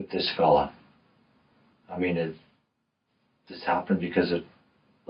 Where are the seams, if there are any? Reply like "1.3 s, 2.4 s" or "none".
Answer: 2.0 s